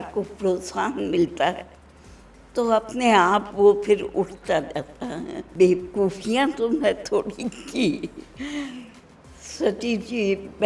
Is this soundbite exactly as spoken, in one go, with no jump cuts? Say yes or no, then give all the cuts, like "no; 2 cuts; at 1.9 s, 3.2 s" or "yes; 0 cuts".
no; 1 cut; at 5.4 s